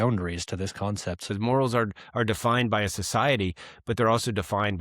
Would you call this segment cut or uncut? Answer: cut